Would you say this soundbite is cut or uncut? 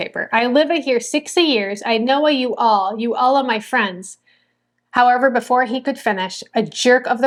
uncut